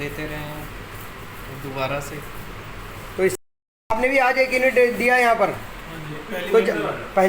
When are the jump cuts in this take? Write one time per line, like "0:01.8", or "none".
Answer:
0:03.3